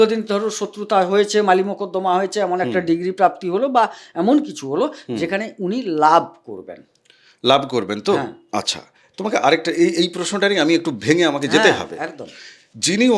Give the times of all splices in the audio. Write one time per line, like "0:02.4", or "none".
none

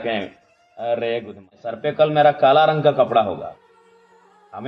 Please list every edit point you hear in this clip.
0:01.8

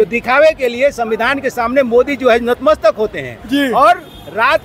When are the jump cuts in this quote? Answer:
none

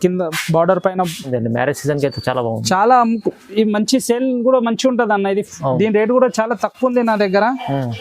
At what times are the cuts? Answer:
0:01.3

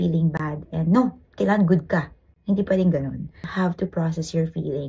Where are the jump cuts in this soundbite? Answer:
0:03.5

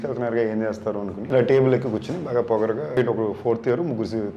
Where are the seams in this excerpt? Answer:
0:01.2
0:03.0

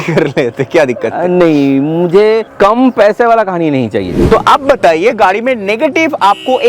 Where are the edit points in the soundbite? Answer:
0:02.5
0:04.2

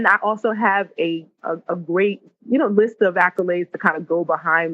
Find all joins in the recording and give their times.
0:01.4
0:02.3

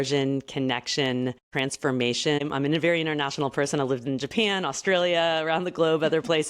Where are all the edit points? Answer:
0:01.5
0:02.4

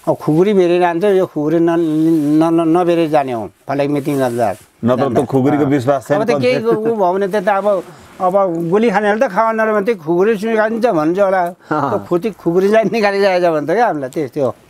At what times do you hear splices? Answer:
none

